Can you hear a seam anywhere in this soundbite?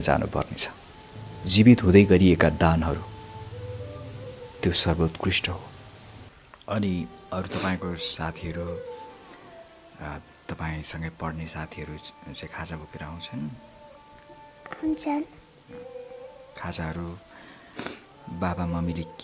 no; 0 cuts

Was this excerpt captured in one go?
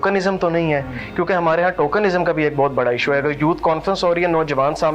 yes; 0 cuts

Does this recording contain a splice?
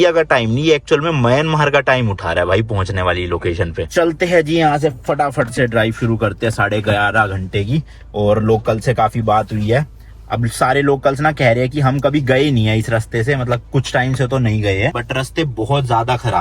no; 0 cuts

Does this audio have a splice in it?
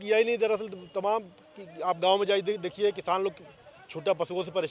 no; 0 cuts

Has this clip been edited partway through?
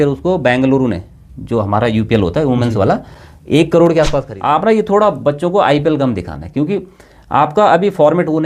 yes; 1 cut; at 4.3 s

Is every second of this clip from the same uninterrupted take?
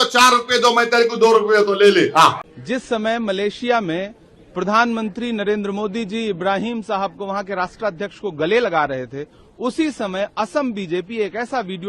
no; 1 cut; at 2.5 s

